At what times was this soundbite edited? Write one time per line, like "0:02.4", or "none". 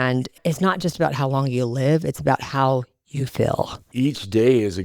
0:03.8